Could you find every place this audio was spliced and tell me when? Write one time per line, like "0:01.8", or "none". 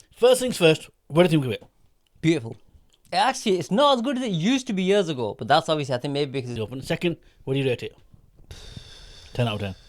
0:06.5